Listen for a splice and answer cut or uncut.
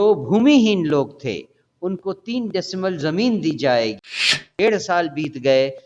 cut